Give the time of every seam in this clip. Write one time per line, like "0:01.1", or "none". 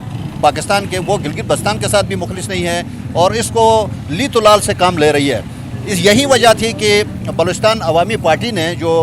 none